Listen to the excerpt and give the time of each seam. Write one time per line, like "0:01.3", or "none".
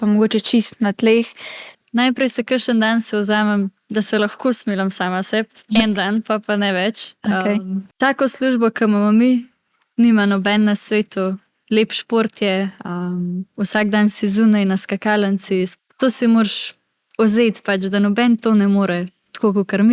0:01.7
0:07.9
0:15.7